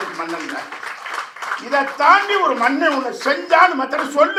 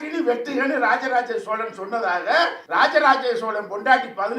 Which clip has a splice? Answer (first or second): second